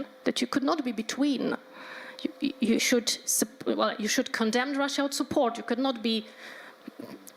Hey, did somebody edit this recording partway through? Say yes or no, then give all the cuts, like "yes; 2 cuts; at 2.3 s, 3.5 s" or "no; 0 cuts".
no; 0 cuts